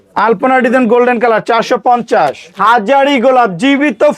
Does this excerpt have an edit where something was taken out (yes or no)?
yes